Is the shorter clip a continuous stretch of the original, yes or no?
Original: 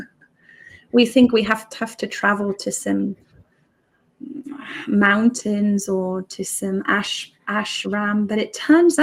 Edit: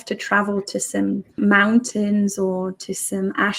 no